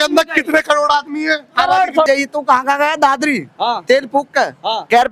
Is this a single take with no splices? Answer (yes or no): no